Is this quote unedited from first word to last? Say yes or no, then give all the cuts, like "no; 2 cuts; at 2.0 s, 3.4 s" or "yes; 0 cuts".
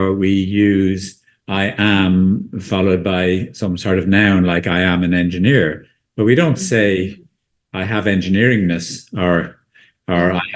yes; 0 cuts